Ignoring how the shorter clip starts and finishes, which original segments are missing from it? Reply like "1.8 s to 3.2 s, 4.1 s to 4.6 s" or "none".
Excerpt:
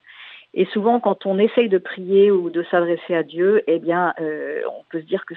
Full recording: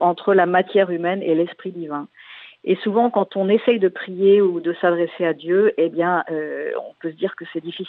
none